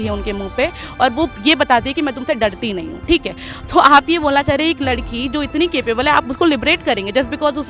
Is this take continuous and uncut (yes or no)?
yes